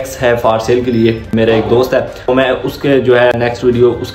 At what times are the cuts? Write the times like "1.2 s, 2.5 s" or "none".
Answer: 1.2 s, 2.3 s, 3.3 s